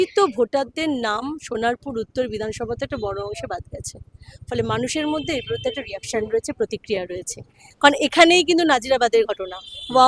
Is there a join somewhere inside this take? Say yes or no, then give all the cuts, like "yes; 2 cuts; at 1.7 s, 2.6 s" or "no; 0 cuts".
yes; 1 cut; at 7.6 s